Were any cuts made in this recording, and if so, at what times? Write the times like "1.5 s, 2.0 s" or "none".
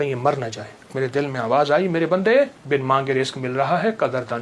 0.9 s, 2.6 s